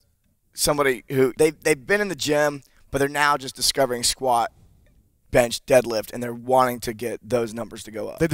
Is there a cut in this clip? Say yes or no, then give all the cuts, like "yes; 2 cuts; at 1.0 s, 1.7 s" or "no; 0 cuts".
yes; 1 cut; at 1.3 s